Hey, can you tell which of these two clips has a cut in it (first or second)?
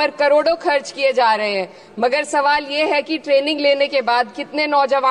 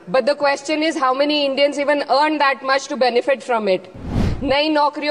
second